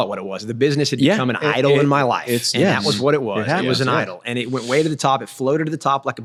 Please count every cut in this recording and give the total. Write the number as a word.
zero